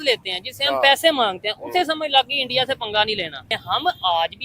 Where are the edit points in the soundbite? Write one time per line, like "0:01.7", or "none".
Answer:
0:03.5